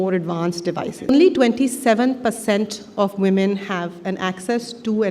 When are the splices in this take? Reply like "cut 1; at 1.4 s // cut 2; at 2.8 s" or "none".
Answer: cut 1; at 1.1 s

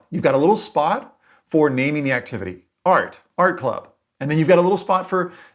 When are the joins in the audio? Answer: cut 1; at 3.2 s

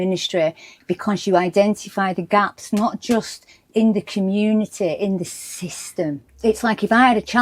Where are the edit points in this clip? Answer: cut 1; at 6.3 s

